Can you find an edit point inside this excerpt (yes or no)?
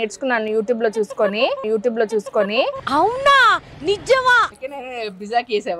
yes